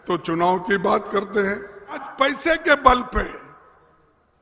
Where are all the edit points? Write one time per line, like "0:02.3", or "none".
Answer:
0:02.0

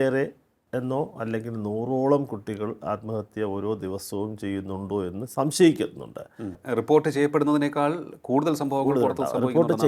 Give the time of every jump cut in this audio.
0:06.6

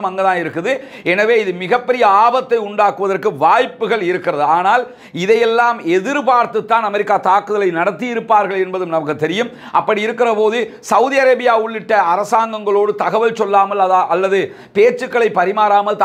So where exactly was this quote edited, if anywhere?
none

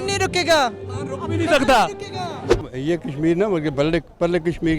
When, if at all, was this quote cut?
0:02.6

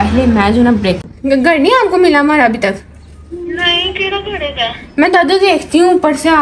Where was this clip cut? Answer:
0:01.0

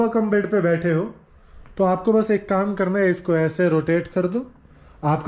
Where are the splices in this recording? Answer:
none

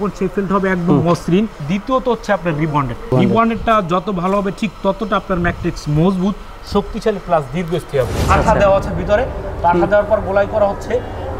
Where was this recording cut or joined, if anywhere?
0:01.6
0:03.1
0:08.2

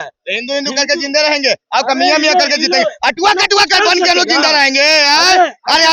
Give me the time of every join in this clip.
none

